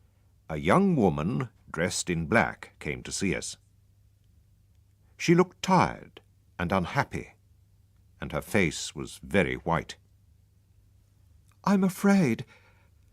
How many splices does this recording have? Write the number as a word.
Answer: one